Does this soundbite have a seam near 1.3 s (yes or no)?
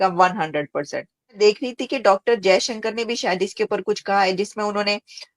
yes